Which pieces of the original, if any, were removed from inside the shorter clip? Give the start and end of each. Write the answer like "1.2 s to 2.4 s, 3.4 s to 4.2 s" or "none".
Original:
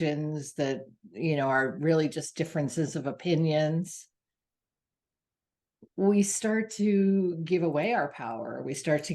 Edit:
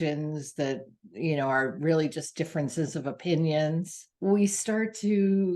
4.0 s to 5.8 s